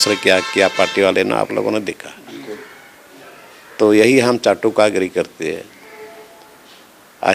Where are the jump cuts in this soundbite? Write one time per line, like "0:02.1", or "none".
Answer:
none